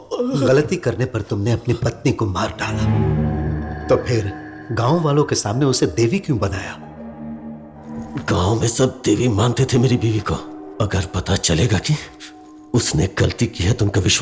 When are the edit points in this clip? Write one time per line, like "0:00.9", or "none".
0:07.8